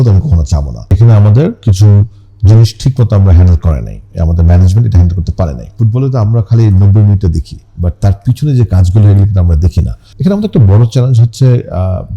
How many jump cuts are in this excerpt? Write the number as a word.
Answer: three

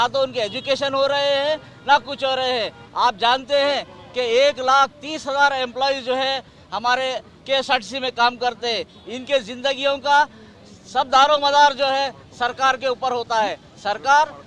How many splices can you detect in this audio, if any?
zero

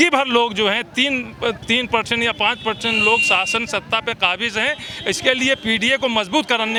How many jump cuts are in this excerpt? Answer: zero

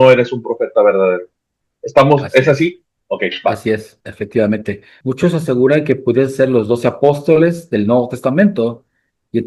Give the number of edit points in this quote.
one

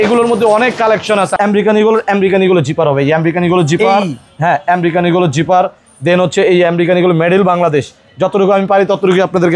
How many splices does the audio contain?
one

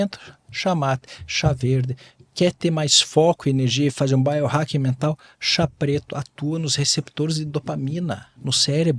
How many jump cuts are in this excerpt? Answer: zero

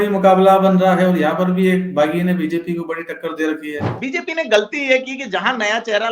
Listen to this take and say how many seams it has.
one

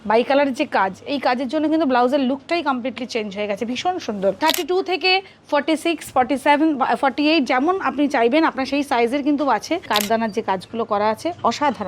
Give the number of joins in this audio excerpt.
two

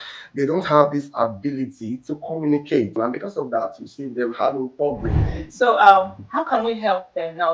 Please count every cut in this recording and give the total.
two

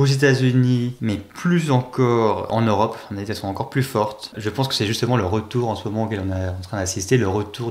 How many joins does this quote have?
three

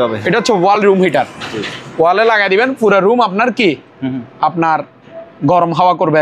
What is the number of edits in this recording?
zero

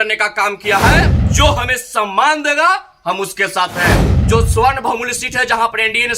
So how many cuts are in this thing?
two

